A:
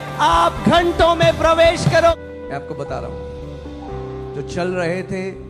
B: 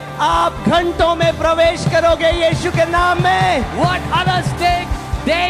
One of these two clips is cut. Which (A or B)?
A